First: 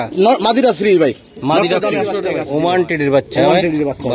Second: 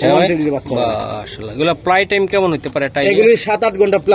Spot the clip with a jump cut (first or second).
first